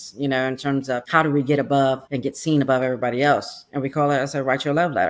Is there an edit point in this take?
no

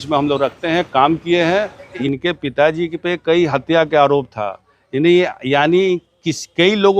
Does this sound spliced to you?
yes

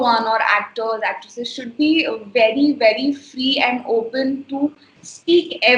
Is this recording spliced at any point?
no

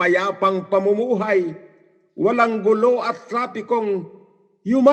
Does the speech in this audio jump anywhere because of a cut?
no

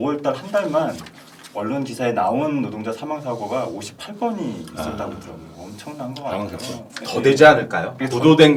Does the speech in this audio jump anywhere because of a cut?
no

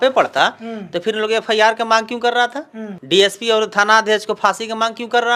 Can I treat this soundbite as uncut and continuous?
yes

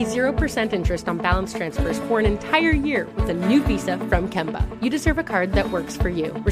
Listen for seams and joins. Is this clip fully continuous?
yes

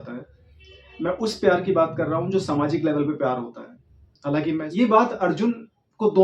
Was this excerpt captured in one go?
no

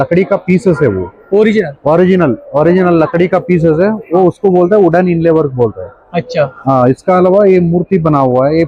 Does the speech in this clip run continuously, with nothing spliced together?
yes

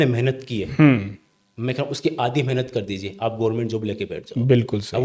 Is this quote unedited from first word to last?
yes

